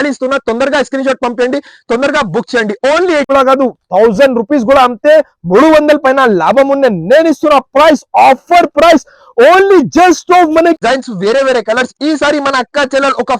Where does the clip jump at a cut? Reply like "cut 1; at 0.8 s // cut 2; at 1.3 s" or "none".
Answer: cut 1; at 3.3 s // cut 2; at 10.8 s